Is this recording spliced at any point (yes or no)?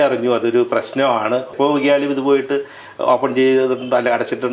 yes